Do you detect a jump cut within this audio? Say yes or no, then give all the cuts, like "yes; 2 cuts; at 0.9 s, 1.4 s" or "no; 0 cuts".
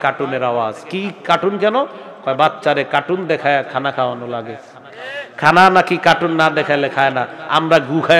no; 0 cuts